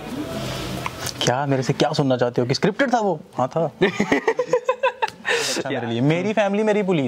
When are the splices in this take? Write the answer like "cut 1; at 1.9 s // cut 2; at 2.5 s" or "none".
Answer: cut 1; at 5.6 s